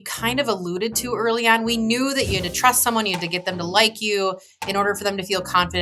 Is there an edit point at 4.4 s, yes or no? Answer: no